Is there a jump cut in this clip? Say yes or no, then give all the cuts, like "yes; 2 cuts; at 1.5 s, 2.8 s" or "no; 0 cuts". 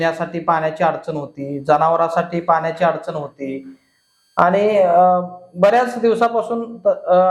no; 0 cuts